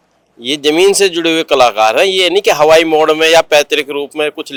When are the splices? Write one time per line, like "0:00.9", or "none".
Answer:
none

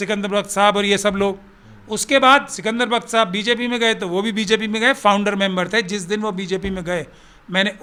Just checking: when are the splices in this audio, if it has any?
none

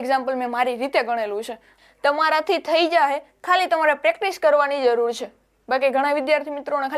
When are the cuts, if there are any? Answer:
0:01.7

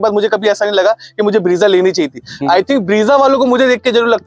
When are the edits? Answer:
none

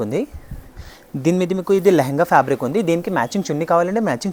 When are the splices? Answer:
none

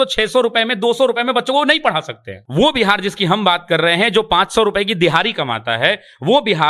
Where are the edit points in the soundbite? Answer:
0:02.3

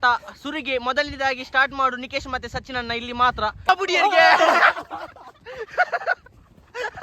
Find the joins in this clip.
0:03.7

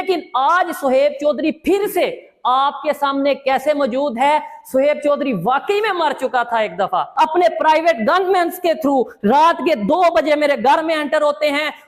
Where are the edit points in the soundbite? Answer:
0:07.1

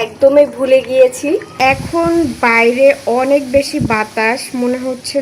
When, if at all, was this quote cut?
0:01.5

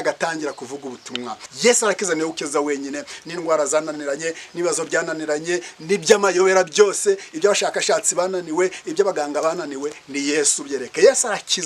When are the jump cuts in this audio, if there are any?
0:01.4

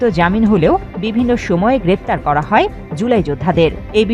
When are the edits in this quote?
none

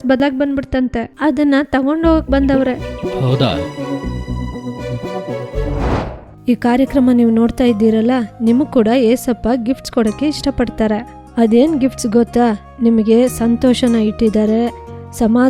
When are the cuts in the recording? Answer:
0:01.1
0:06.2

